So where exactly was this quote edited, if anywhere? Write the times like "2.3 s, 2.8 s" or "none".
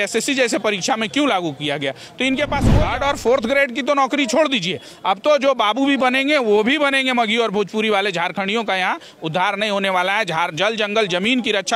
2.6 s